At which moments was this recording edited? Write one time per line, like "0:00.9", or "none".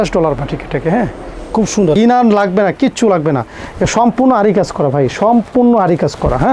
0:02.0